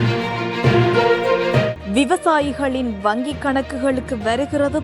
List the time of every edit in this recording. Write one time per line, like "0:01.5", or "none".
0:01.8